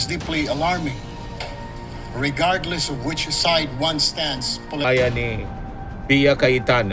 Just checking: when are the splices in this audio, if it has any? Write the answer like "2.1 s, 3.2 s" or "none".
4.8 s